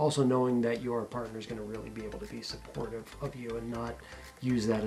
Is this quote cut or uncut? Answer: uncut